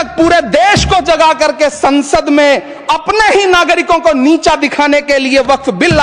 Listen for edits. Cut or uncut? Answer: uncut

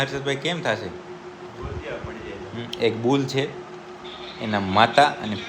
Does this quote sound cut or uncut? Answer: uncut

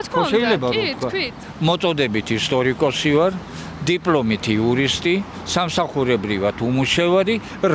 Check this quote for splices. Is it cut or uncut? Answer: cut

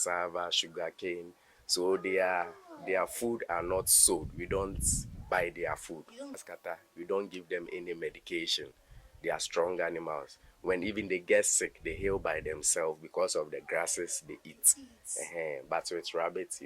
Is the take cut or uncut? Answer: cut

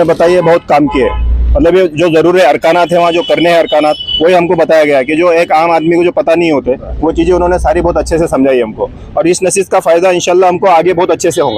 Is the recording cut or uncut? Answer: uncut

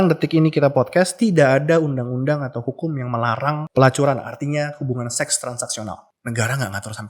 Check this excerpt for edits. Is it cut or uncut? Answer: cut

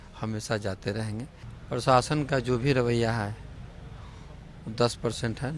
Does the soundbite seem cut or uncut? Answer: cut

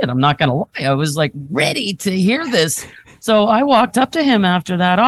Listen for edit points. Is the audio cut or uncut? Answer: cut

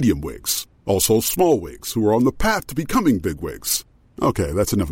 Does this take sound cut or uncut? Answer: uncut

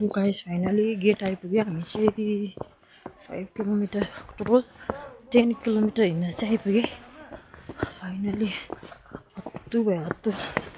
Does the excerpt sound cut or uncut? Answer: uncut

